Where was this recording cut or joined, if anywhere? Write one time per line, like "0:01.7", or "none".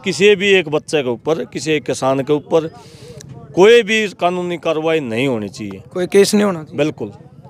none